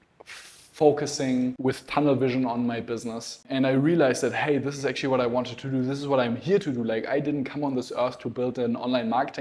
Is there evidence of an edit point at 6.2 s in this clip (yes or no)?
no